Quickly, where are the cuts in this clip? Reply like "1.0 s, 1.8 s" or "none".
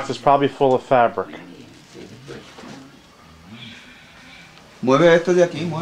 none